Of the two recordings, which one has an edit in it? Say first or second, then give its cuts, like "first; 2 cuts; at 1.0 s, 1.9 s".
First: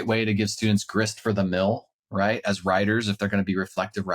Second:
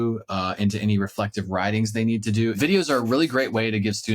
second; 1 cut; at 2.6 s